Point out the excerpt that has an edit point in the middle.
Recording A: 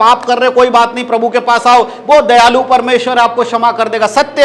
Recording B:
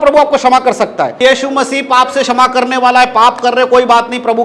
B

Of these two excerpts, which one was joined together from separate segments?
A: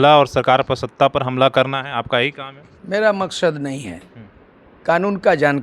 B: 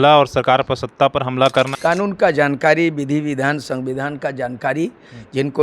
B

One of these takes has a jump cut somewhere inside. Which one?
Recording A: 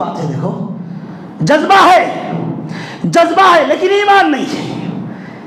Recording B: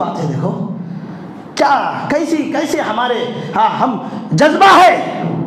A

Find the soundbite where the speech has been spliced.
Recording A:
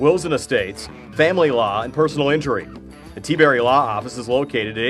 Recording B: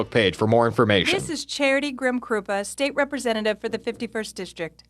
B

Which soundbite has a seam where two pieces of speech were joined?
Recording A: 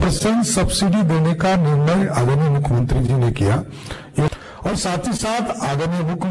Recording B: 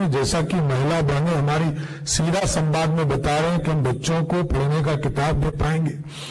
A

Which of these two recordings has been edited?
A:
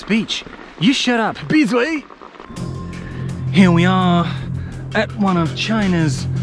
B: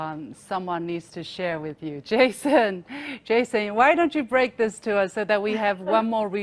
A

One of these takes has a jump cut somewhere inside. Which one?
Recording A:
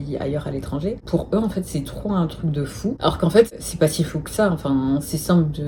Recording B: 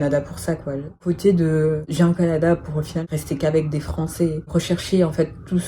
B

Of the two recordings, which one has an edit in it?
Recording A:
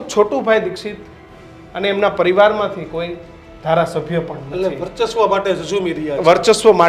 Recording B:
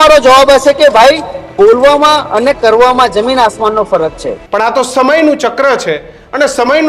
B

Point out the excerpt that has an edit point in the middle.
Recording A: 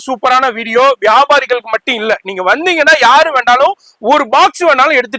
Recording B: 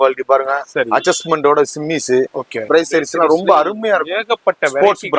B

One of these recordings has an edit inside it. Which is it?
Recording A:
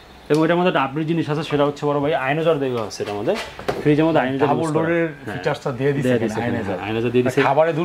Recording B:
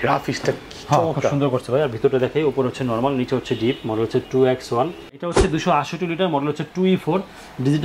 B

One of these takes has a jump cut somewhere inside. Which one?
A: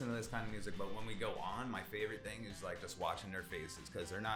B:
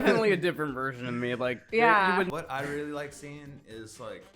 B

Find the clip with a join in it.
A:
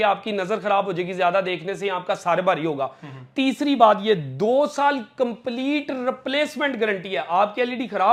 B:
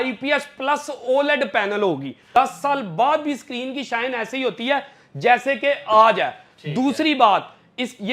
B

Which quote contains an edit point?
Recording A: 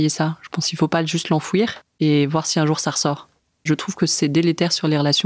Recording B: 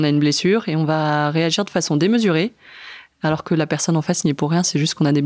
A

